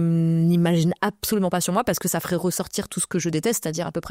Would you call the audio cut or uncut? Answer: uncut